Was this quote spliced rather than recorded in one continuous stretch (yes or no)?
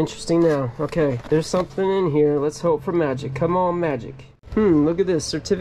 yes